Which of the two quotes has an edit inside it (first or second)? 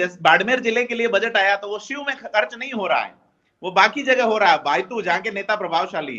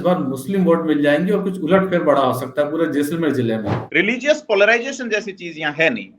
second